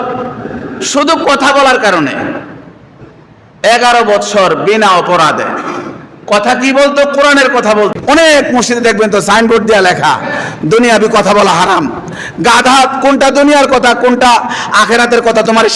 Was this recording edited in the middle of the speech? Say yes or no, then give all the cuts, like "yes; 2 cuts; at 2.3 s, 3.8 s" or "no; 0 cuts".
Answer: yes; 1 cut; at 8.0 s